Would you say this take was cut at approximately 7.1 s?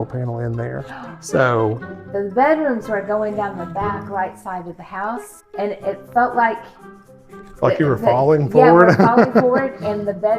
no; 2 cuts; at 1.9 s, 5.4 s

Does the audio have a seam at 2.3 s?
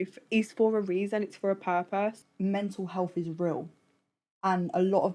yes; 1 cut; at 2.3 s

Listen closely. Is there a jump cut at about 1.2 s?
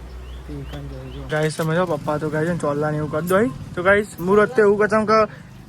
yes; 1 cut; at 1.2 s

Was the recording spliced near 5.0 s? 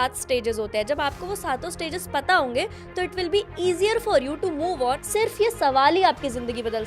yes; 1 cut; at 5.0 s

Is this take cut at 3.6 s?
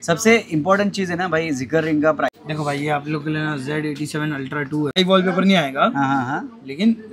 no; 2 cuts; at 2.3 s, 4.9 s

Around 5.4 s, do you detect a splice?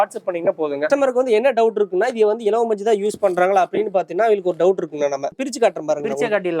yes; 2 cuts; at 0.9 s, 5.4 s

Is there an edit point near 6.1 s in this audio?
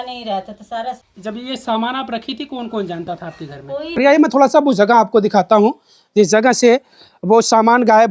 no; 2 cuts; at 1.1 s, 3.9 s

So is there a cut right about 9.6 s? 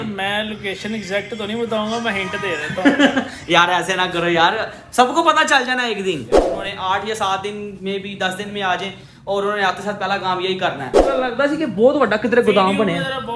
no; 2 cuts; at 6.5 s, 11.1 s

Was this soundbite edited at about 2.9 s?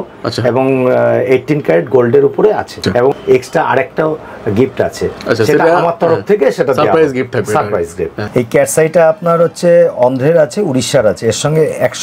yes; 2 cuts; at 2.9 s, 8.2 s

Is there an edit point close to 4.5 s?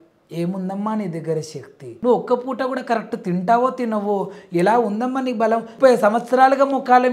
no; 2 cuts; at 1.9 s, 5.7 s

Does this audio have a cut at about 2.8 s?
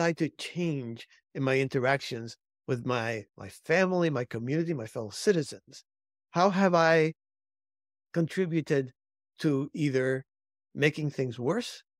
no; 0 cuts

